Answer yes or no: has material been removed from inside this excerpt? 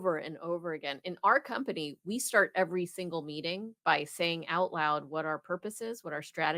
no